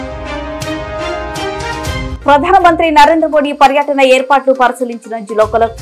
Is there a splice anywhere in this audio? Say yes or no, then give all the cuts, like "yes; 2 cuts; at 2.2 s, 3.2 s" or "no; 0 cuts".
no; 0 cuts